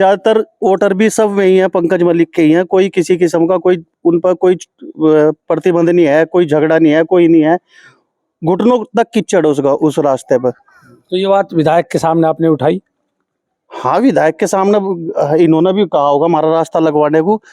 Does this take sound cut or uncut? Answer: uncut